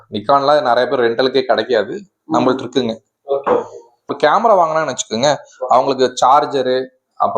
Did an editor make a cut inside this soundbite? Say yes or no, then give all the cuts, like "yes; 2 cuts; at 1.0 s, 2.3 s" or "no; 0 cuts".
yes; 1 cut; at 4.2 s